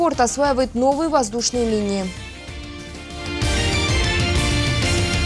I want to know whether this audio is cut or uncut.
cut